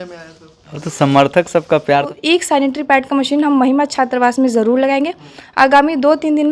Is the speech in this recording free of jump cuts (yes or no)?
no